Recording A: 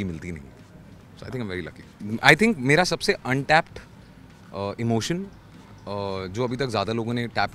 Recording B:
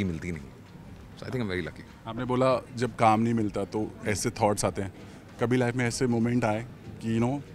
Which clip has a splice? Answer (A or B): A